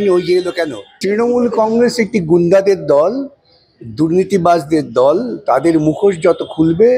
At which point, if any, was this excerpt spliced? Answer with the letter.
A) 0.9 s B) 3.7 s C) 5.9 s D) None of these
A